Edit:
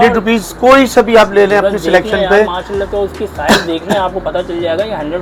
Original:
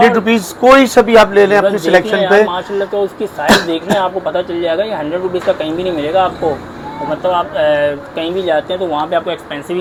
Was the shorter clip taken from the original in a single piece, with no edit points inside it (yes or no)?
yes